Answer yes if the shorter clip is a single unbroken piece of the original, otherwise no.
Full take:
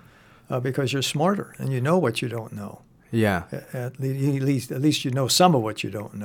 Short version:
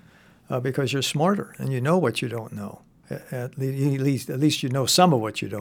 no